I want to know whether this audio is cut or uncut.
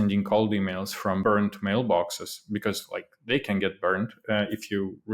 cut